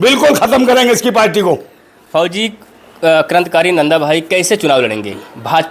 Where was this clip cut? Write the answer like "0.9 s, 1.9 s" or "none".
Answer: none